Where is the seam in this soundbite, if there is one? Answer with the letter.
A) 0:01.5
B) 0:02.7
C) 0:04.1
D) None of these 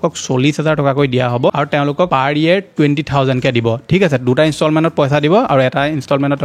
D